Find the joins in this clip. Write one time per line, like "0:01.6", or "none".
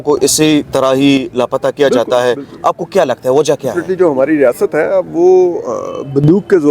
0:03.8